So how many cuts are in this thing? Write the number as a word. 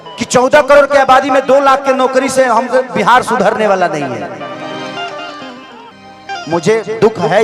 one